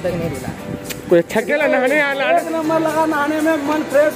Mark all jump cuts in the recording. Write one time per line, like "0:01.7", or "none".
0:01.5